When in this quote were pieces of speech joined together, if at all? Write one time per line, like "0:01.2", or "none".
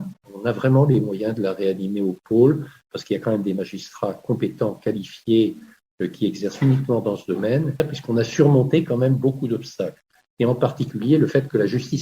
0:07.8